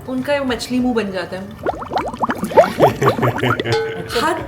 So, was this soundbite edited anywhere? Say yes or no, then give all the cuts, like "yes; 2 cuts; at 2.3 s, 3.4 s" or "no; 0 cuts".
no; 0 cuts